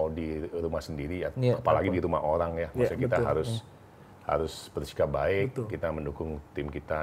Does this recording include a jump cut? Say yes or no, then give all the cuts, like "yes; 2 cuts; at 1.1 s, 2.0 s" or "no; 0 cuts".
no; 0 cuts